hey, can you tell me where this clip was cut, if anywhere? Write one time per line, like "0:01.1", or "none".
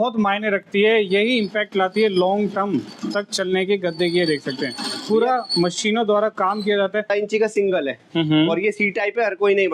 0:07.1